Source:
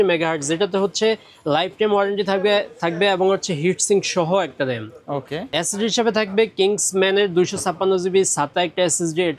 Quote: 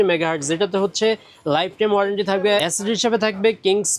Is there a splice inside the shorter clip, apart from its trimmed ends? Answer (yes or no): yes